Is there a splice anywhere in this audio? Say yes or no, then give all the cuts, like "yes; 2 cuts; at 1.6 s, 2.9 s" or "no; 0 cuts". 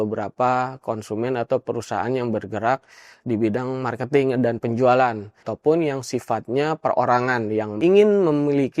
yes; 2 cuts; at 5.5 s, 7.7 s